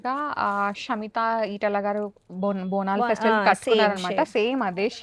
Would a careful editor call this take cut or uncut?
uncut